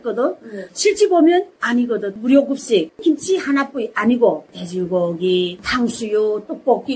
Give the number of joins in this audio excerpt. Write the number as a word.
two